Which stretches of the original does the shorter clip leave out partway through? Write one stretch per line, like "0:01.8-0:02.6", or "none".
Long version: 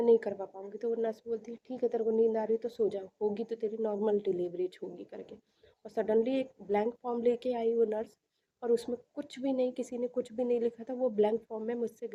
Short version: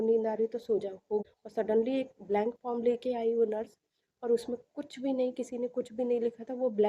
0:03.4-0:05.7